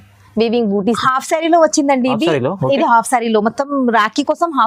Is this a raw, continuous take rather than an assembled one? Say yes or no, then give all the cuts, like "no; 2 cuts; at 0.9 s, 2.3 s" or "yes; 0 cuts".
no; 1 cut; at 1.0 s